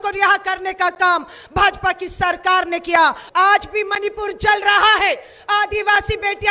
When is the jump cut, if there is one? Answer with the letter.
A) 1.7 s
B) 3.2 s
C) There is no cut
B